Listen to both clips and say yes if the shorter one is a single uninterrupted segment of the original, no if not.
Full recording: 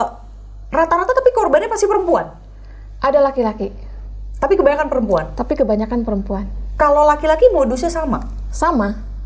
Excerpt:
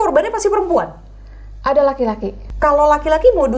no